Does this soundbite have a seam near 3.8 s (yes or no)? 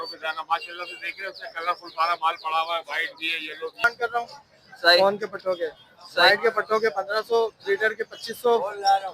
yes